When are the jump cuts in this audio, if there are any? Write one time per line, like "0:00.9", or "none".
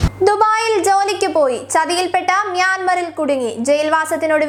none